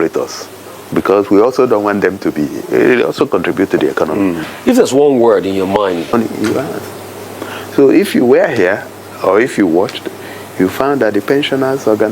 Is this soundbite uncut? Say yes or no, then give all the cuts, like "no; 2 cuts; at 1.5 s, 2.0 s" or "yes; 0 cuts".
no; 1 cut; at 6.1 s